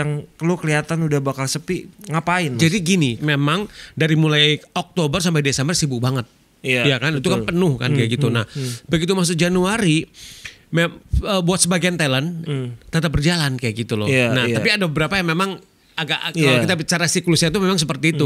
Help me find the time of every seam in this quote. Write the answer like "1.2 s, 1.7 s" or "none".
3.2 s